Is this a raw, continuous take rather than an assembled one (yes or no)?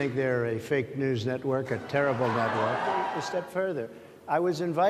no